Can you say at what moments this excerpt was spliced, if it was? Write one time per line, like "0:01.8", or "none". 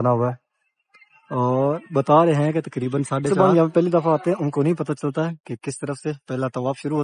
0:03.3